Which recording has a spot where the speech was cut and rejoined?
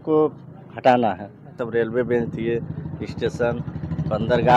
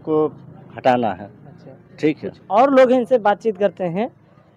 first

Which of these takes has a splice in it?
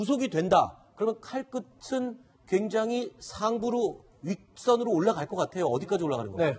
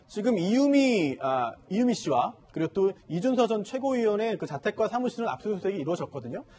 first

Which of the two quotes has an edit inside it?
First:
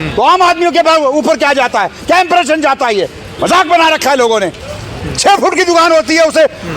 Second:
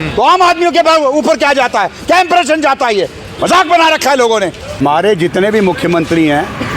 second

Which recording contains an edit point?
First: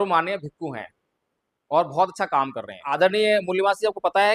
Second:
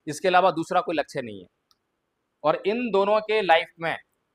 first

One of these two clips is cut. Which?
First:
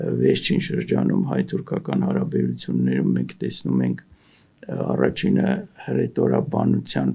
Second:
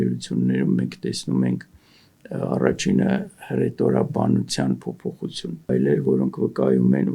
second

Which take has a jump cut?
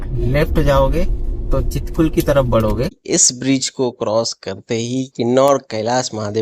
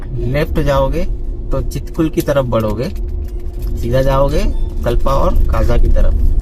first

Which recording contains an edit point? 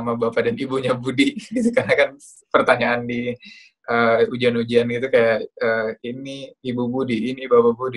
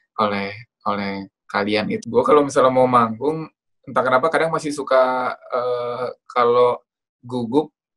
second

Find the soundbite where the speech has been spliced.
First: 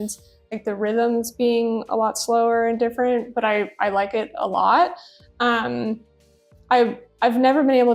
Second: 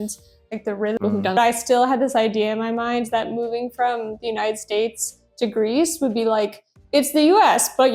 second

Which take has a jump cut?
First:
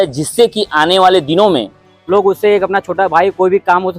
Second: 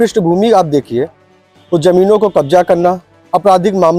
first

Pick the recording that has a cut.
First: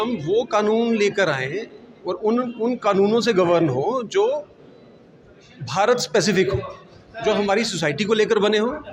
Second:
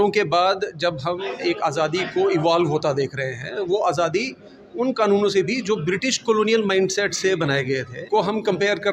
second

